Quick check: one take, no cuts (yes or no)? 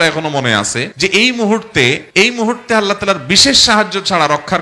yes